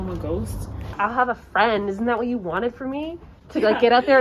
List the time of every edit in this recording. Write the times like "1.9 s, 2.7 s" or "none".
0.9 s